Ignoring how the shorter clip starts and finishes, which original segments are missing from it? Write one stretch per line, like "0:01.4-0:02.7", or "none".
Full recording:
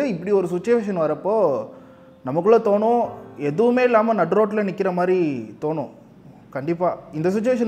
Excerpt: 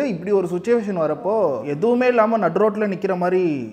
0:01.6-0:03.4